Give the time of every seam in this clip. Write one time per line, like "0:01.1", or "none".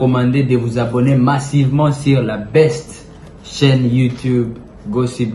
none